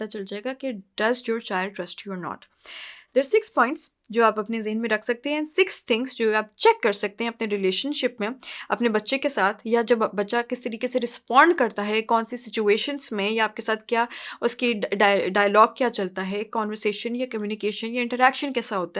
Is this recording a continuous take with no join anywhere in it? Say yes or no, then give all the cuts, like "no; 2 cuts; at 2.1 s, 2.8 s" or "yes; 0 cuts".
yes; 0 cuts